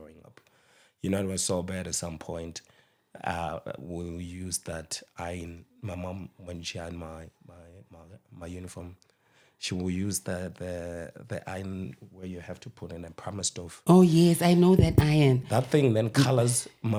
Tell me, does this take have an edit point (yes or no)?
no